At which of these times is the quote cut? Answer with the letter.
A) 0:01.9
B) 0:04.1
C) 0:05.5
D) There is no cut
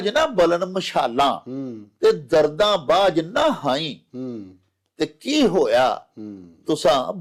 D